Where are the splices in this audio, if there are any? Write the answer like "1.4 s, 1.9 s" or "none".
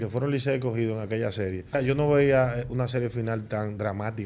1.8 s